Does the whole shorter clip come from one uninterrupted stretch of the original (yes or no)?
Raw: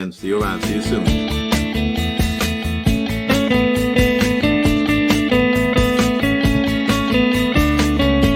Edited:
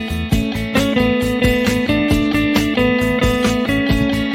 yes